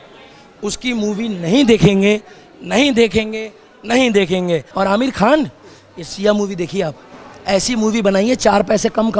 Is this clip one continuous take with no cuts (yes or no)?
no